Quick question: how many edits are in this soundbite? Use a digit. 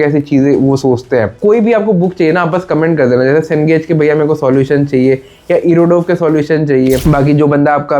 2